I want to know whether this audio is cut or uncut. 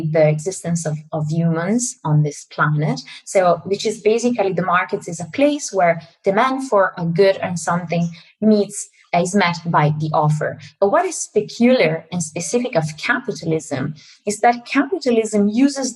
uncut